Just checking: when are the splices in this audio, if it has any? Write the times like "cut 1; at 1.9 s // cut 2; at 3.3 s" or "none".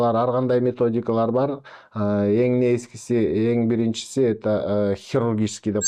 none